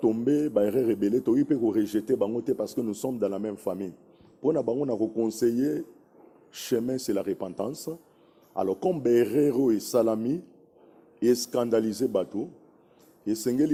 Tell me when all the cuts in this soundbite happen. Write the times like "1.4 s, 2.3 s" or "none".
none